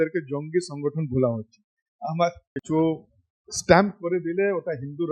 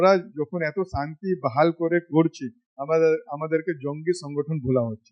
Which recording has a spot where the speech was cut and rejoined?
first; 1 cut; at 2.5 s

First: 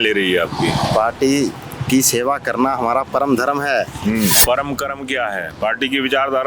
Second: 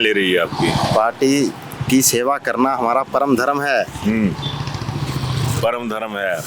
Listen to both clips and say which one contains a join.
first; 1 cut; at 4.4 s

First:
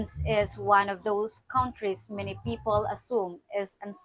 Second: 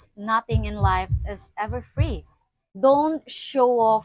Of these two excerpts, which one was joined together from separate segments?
second; 1 cut; at 2.4 s

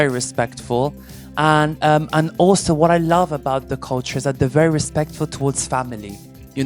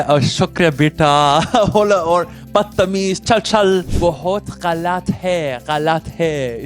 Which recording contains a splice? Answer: second; 1 cut; at 3.9 s

